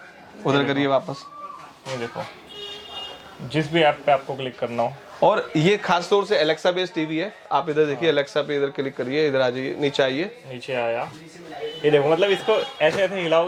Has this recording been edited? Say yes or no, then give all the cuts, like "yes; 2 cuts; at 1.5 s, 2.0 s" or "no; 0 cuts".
no; 0 cuts